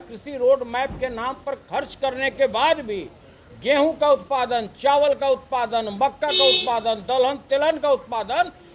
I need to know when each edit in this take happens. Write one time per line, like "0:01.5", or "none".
none